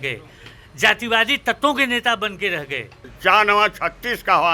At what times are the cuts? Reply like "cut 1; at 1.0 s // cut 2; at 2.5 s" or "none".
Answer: cut 1; at 3.0 s